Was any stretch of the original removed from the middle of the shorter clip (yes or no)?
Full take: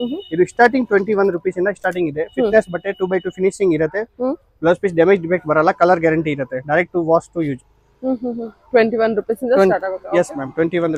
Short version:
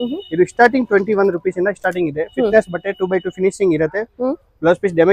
no